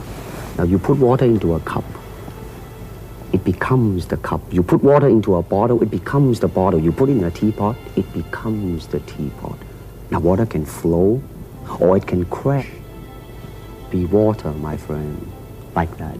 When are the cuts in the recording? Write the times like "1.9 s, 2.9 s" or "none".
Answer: 12.6 s